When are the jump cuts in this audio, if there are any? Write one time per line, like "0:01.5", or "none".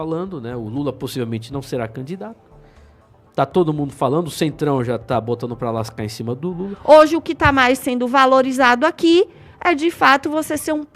0:06.7